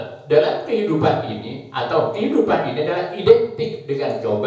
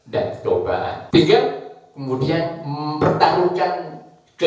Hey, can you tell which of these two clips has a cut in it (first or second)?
second